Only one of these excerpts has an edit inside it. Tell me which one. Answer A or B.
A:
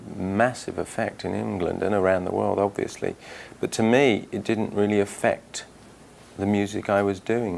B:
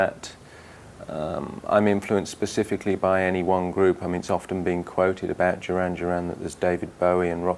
A